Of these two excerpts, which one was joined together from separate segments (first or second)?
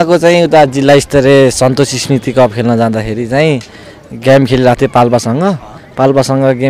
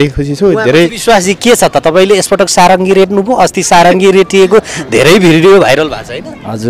second